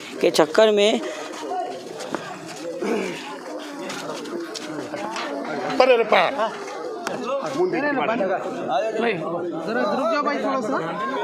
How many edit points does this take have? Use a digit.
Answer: 0